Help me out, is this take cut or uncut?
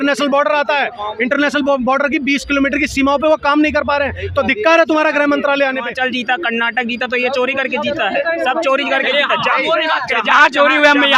cut